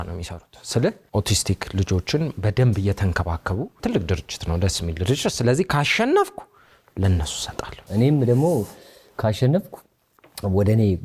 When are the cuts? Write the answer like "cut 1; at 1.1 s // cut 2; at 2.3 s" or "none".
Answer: cut 1; at 1.0 s // cut 2; at 3.8 s // cut 3; at 7.8 s

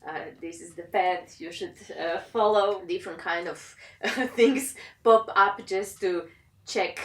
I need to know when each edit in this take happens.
cut 1; at 2.8 s

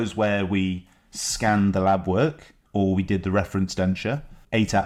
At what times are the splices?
none

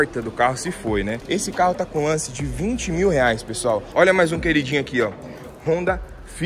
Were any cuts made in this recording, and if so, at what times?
cut 1; at 1.2 s // cut 2; at 3.9 s

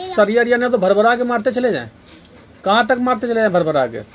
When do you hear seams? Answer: none

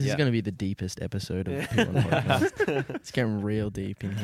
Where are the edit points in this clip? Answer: none

